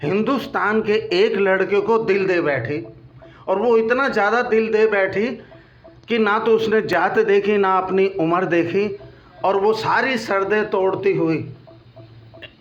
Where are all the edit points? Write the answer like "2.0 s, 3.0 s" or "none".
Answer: none